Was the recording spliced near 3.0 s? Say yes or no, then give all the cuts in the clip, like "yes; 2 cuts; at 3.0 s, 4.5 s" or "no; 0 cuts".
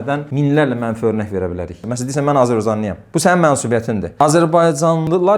no; 1 cut; at 1.8 s